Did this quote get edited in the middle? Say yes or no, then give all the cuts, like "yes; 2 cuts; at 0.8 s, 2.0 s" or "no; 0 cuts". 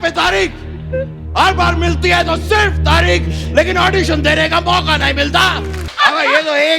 yes; 1 cut; at 5.8 s